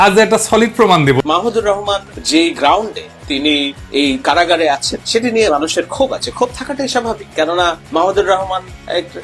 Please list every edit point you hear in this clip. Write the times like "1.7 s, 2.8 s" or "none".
1.2 s, 2.1 s, 3.8 s, 7.8 s

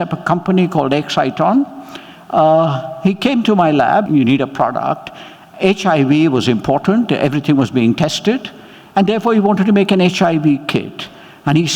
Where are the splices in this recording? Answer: 4.1 s

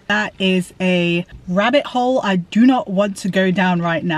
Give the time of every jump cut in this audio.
1.4 s

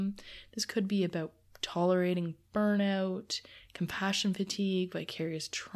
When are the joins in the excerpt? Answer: none

